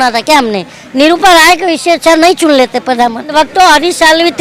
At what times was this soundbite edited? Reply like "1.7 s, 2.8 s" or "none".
3.3 s